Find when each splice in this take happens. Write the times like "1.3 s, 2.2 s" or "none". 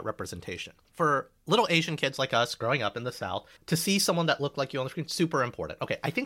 0.9 s, 3.5 s